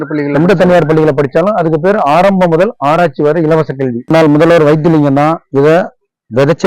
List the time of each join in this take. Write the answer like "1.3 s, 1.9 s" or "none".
4.0 s